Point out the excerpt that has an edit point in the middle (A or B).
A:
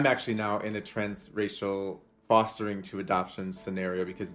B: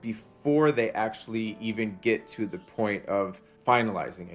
B